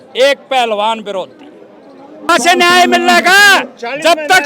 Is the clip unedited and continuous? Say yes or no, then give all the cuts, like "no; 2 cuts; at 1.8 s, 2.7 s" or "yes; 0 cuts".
no; 1 cut; at 2.3 s